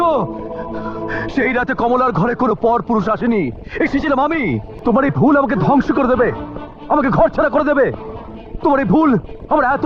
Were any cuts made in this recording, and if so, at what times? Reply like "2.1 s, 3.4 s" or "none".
4.7 s